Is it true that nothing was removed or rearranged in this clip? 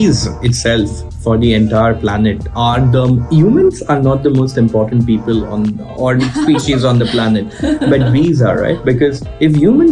yes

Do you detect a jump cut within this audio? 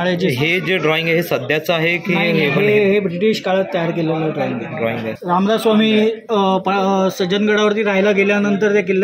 yes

